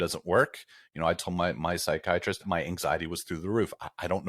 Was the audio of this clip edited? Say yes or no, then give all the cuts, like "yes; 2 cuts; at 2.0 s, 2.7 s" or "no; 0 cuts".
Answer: yes; 1 cut; at 2.4 s